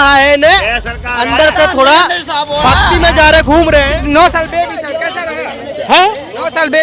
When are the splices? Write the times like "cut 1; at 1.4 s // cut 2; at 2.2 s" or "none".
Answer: cut 1; at 3.9 s